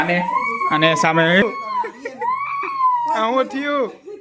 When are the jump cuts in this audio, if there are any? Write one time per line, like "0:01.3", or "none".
0:01.4